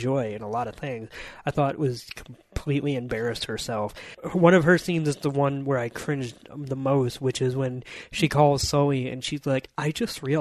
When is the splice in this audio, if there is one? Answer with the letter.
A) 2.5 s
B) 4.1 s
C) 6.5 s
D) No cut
B